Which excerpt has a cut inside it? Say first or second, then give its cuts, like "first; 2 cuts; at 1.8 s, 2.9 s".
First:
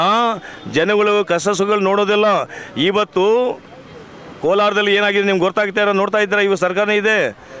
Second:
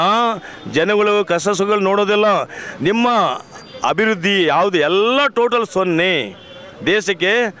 second; 1 cut; at 2.6 s